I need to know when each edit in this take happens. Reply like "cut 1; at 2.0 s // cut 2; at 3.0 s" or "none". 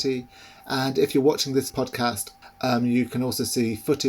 cut 1; at 2.2 s